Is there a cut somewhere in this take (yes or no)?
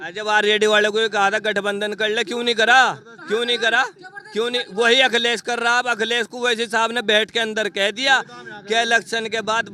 no